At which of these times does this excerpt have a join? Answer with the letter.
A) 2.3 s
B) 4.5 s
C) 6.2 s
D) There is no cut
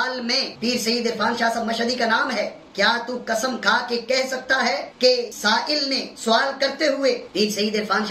D